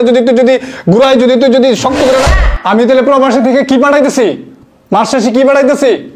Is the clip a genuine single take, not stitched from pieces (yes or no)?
no